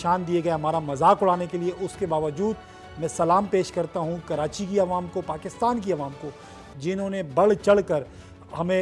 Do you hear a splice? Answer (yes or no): no